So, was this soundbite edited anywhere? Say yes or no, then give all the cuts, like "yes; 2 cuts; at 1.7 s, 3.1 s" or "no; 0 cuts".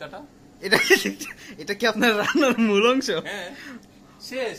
no; 0 cuts